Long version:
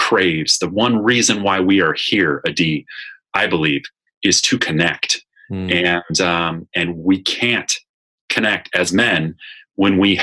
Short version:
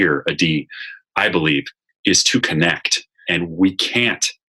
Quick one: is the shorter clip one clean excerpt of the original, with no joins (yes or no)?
no